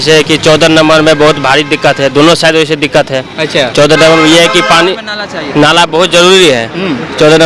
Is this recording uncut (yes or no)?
yes